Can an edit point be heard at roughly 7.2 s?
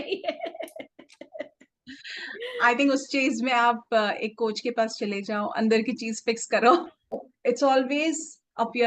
yes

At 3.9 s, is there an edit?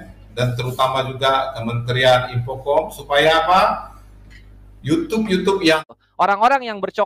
no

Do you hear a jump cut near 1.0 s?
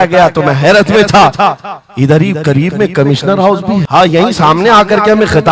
no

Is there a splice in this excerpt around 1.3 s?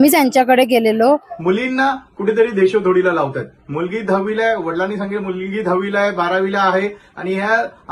yes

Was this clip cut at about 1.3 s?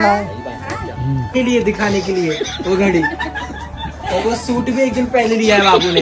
yes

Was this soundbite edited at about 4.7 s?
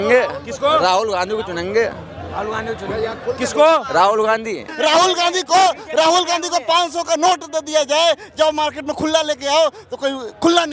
yes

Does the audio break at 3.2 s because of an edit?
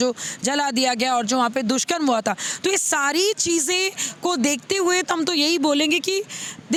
no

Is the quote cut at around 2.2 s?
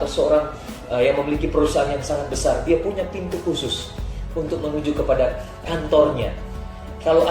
no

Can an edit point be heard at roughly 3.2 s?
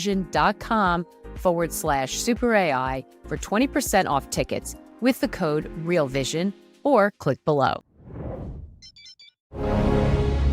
no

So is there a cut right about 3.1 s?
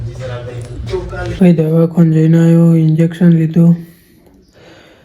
no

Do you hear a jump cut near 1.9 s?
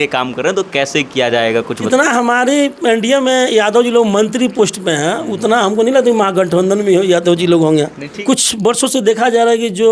yes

